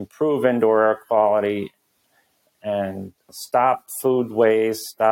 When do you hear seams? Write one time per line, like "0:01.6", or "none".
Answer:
0:03.3

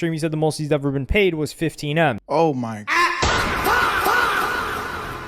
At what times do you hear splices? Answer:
0:02.2

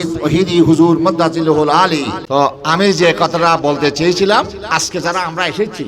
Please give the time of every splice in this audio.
0:02.2

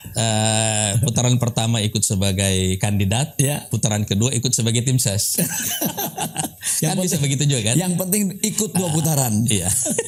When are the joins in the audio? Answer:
none

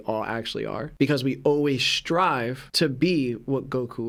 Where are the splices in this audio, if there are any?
none

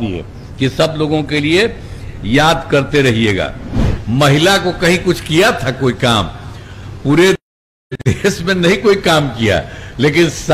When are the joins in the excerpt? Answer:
0:03.9

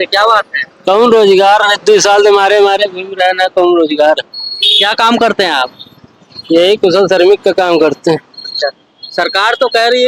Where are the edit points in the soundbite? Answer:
none

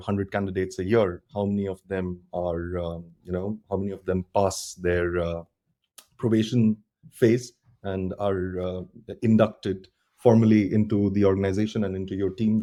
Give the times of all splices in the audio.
none

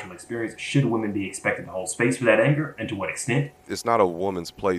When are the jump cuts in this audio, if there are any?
0:03.7

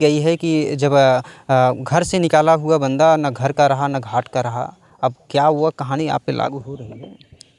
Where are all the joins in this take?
none

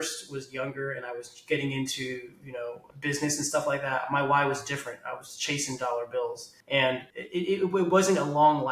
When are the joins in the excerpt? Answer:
0:02.8
0:06.5
0:07.1

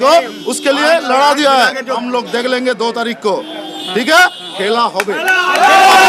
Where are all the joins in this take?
0:01.9

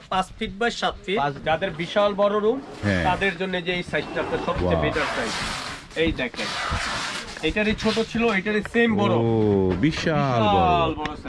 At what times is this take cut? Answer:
0:01.4

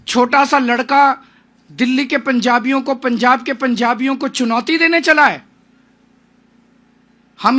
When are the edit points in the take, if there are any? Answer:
none

